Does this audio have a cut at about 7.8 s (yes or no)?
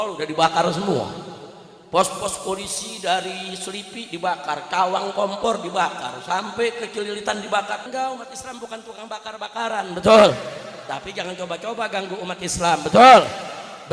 yes